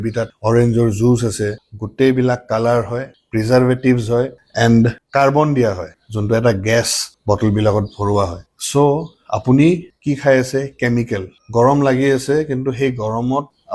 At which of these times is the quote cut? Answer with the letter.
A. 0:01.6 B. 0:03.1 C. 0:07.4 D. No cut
A